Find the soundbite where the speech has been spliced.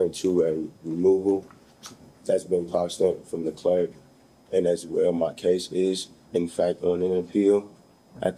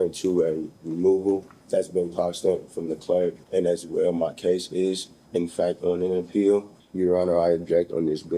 second; 3 cuts; at 1.5 s, 3.4 s, 6.8 s

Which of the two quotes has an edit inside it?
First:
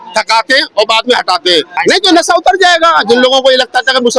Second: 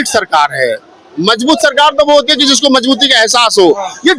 first; 1 cut; at 1.8 s

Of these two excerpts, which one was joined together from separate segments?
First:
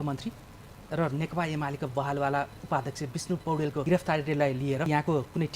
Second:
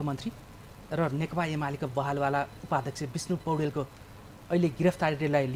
first; 2 cuts; at 3.8 s, 4.9 s

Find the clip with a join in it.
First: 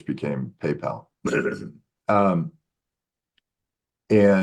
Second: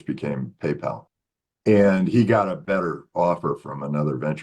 second; 1 cut; at 1.1 s

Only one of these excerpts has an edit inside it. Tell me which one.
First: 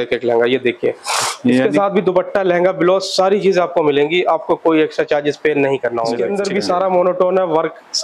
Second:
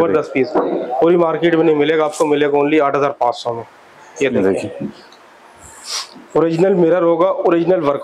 first; 1 cut; at 6.3 s

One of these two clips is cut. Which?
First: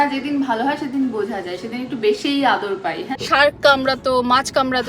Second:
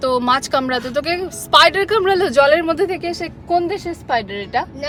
first; 1 cut; at 3.1 s

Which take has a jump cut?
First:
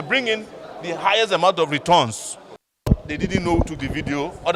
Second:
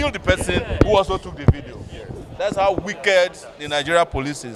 first; 1 cut; at 2.7 s

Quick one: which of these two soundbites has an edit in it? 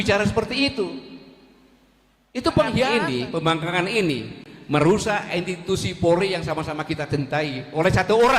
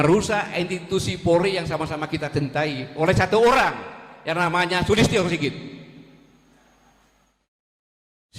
first; 1 cut; at 2.9 s

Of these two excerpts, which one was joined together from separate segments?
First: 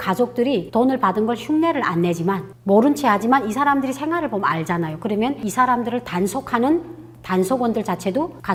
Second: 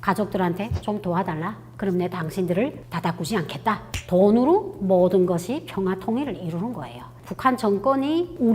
second; 1 cut; at 7.2 s

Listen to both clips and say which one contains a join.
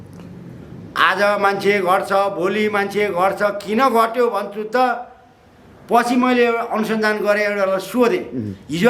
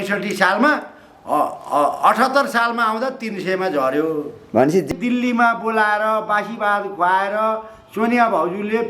second; 1 cut; at 4.9 s

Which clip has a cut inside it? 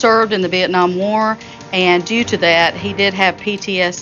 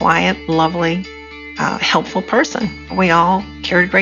second; 1 cut; at 2.9 s

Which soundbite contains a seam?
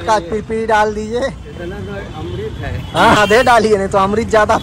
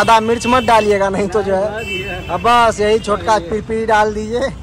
first; 1 cut; at 3.2 s

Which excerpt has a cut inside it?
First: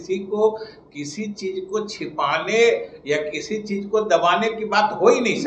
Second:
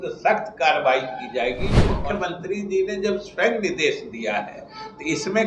second; 1 cut; at 1.9 s

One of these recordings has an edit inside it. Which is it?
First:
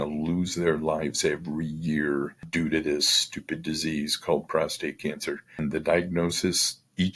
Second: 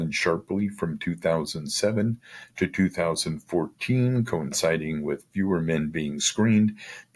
first; 2 cuts; at 2.4 s, 5.6 s

